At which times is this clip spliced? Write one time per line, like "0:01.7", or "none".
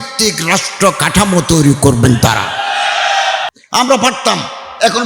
0:03.5

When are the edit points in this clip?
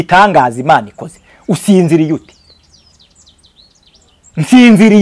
none

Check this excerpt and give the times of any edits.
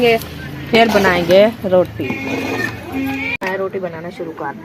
0:03.4

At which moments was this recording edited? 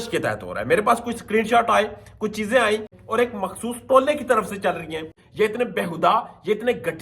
0:02.9
0:05.2

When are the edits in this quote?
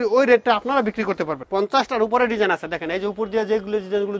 0:01.3

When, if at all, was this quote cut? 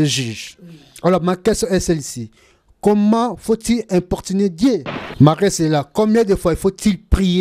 0:05.0

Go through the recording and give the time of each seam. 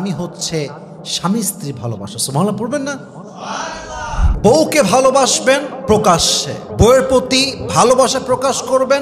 0:04.2

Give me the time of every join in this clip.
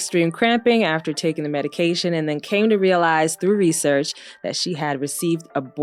none

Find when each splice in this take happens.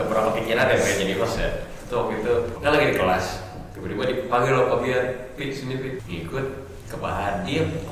0:02.5
0:06.0

